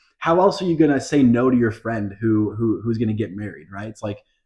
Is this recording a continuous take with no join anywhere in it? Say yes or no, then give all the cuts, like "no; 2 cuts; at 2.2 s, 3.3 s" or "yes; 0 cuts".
yes; 0 cuts